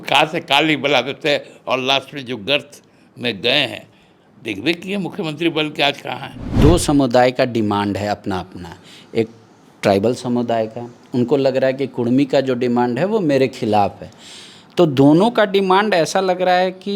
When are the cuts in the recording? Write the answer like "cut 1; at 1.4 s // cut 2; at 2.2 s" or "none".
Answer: cut 1; at 6.4 s